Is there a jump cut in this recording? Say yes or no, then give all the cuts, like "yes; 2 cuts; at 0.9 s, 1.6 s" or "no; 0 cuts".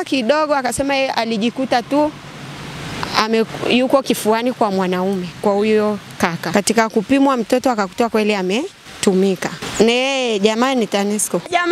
yes; 3 cuts; at 6.4 s, 8.8 s, 9.6 s